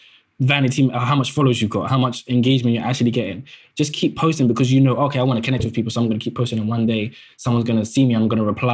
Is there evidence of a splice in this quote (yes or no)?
no